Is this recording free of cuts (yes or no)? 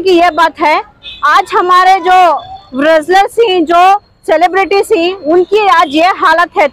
yes